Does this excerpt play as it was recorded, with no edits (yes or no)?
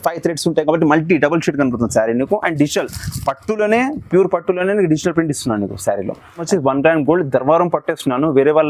no